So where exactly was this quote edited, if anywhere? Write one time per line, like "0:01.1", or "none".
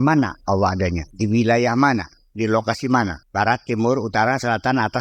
0:01.1
0:03.2